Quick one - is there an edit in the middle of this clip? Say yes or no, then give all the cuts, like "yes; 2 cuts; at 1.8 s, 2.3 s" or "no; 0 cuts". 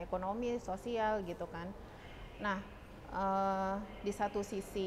no; 0 cuts